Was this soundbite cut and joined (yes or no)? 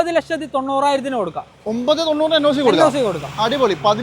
no